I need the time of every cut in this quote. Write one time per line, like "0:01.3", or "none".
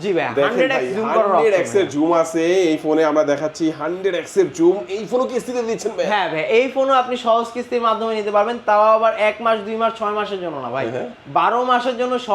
none

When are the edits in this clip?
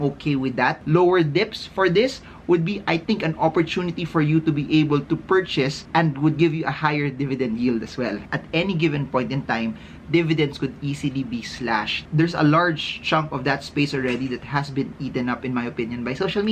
0:00.8
0:05.8
0:08.3
0:12.0

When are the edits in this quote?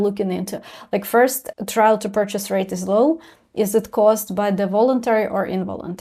0:01.4

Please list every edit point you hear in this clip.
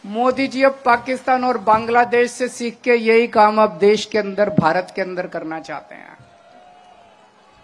none

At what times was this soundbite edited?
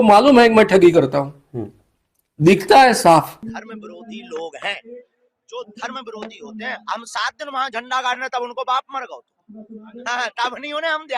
0:03.2

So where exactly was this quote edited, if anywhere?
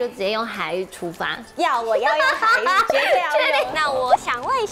0:03.7

